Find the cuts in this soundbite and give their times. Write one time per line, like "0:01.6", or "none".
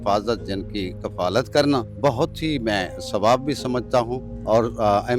0:01.9
0:04.3